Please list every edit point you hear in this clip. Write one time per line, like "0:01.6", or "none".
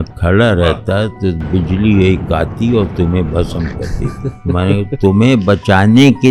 none